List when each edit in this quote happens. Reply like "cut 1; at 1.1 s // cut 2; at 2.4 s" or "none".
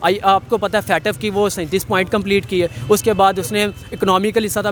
none